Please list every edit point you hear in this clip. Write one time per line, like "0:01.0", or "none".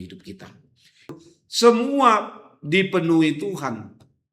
0:01.1